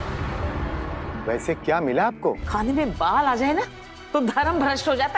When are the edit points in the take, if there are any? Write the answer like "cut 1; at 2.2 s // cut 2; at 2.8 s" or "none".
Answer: cut 1; at 2.4 s